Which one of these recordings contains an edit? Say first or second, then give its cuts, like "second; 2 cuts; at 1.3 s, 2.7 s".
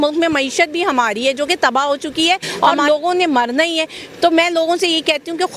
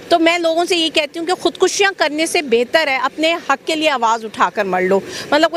first; 1 cut; at 2.5 s